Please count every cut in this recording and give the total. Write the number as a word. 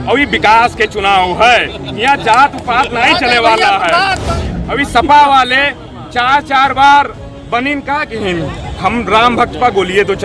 one